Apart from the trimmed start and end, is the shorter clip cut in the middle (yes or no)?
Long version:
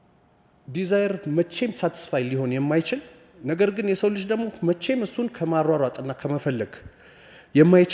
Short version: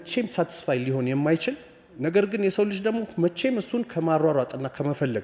no